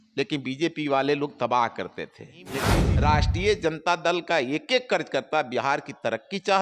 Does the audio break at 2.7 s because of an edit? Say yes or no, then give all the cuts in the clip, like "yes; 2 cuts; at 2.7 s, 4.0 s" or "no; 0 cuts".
yes; 1 cut; at 2.7 s